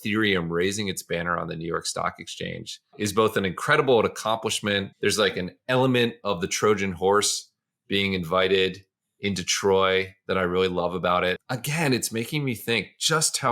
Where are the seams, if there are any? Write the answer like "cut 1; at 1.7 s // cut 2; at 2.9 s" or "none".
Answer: cut 1; at 2.9 s // cut 2; at 4.9 s // cut 3; at 11.5 s